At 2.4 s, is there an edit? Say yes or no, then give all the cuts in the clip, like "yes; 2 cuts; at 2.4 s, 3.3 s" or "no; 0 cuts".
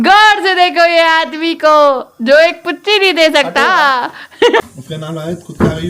no; 1 cut; at 4.6 s